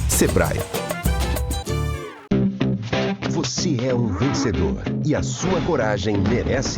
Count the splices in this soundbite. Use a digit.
1